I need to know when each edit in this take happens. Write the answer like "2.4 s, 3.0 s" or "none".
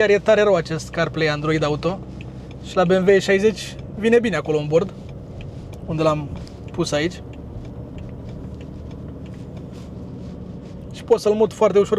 none